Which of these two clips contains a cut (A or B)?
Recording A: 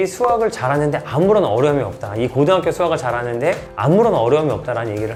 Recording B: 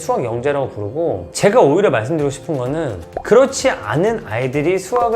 B